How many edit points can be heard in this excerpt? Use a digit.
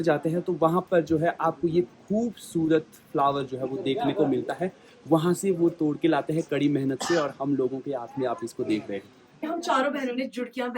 1